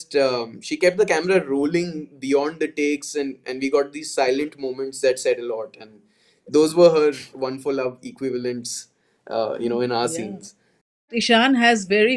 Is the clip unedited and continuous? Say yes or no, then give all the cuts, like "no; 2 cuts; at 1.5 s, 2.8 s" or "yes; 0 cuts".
no; 1 cut; at 11.1 s